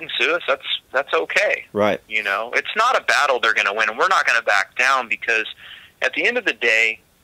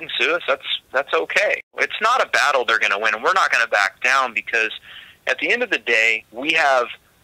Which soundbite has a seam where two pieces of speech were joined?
second; 2 cuts; at 1.7 s, 6.2 s

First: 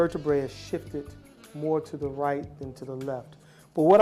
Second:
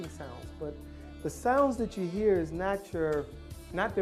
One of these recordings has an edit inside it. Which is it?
first; 1 cut; at 1.2 s

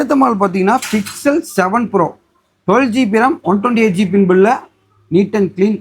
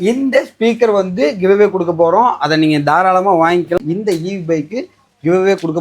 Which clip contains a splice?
second; 1 cut; at 3.8 s

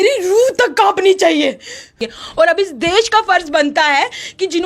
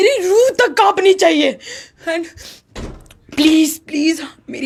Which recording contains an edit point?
first; 1 cut; at 2.0 s

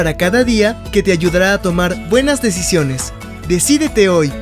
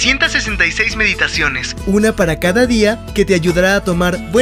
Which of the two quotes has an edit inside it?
first; 1 cut; at 3.1 s

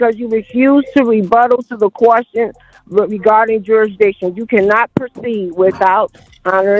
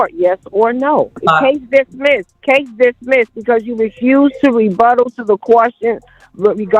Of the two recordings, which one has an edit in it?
second; 2 cuts; at 1.2 s, 2.3 s

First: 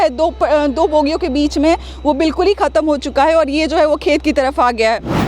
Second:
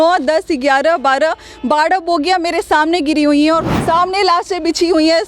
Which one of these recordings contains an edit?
second; 1 cut; at 3.7 s

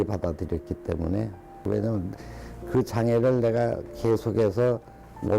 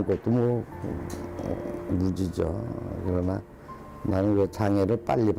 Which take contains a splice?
first; 1 cut; at 1.5 s

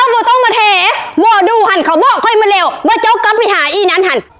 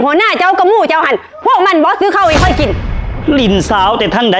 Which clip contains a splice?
second; 1 cut; at 2.9 s

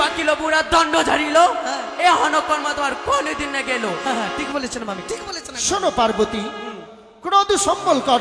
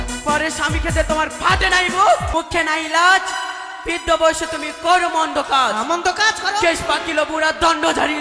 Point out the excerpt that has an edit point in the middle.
second; 1 cut; at 2.3 s

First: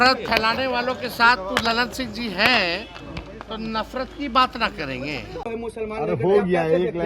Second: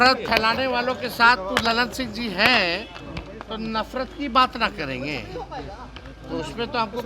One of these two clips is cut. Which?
first; 1 cut; at 5.3 s

